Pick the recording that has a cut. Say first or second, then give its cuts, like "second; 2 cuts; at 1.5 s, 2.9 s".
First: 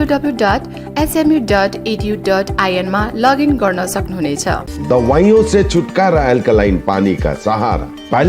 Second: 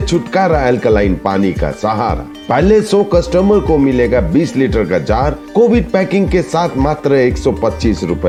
first; 1 cut; at 4.7 s